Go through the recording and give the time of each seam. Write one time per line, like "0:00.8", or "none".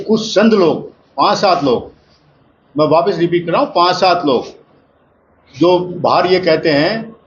none